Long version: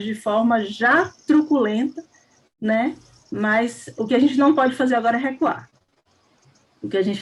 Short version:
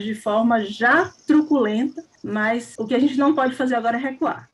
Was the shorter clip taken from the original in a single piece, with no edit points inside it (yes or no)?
no